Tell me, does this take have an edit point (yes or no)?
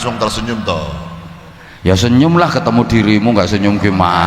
no